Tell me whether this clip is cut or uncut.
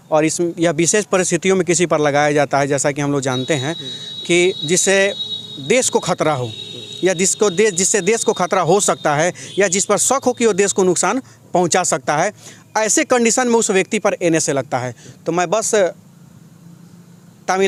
uncut